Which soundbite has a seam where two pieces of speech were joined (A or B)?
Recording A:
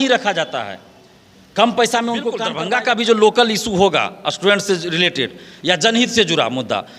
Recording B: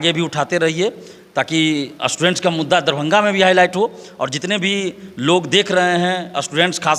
A